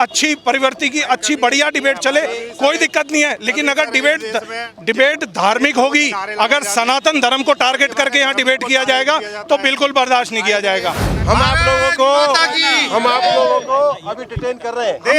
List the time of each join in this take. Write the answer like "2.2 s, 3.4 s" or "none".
11.1 s